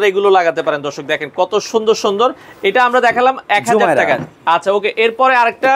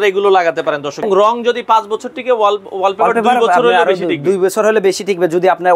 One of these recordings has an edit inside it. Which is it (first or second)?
second